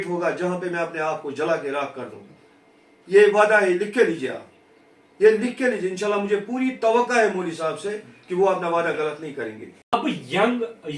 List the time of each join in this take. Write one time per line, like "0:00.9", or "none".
0:09.9